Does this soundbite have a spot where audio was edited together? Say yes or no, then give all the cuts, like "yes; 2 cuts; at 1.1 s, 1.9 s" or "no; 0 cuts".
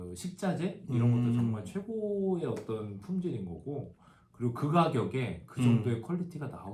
no; 0 cuts